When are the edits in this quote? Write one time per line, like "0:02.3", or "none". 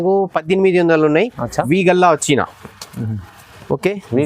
0:01.7